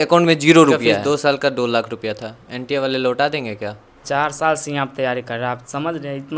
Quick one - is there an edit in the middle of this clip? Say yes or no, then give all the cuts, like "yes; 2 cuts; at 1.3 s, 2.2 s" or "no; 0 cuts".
yes; 2 cuts; at 0.9 s, 3.9 s